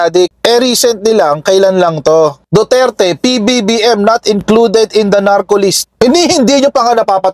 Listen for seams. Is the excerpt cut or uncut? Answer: cut